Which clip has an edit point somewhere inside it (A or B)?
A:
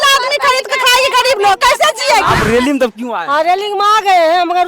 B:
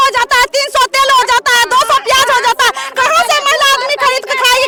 A